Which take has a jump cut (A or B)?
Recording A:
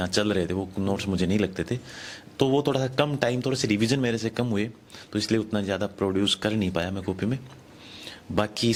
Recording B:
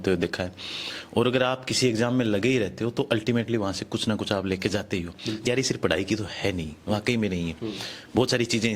B